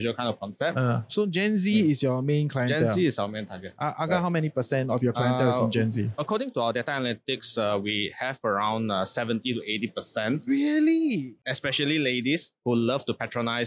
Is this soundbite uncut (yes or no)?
no